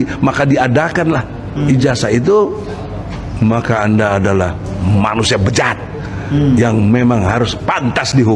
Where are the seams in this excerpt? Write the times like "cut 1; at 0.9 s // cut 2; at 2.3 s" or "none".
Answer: none

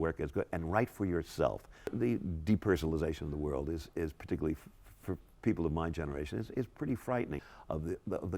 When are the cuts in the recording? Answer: cut 1; at 1.8 s // cut 2; at 7.4 s

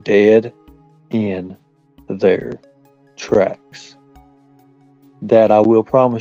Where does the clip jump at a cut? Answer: none

